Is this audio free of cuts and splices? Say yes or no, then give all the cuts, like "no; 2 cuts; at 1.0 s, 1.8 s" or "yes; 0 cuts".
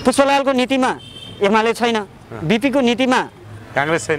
yes; 0 cuts